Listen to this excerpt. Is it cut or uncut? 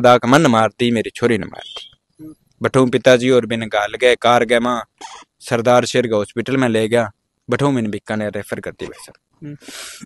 uncut